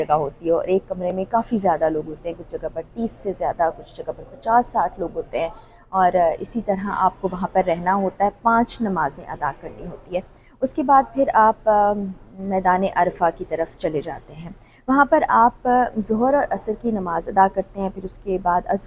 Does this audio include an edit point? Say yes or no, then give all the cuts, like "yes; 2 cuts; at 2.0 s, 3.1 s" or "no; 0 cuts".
no; 0 cuts